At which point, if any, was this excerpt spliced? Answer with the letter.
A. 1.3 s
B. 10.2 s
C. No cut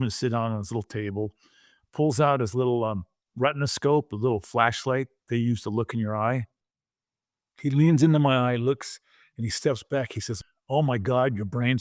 B